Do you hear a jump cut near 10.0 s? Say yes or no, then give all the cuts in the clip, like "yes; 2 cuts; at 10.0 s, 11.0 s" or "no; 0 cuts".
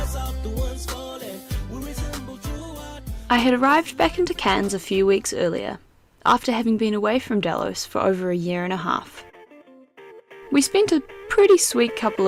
no; 0 cuts